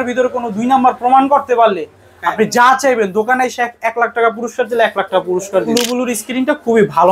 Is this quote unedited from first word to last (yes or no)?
no